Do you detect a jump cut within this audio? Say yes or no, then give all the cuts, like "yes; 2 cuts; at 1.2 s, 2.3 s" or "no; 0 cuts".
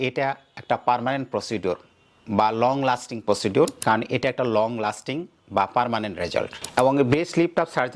yes; 1 cut; at 3.8 s